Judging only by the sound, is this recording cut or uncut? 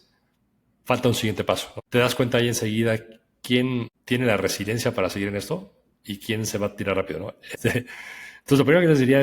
cut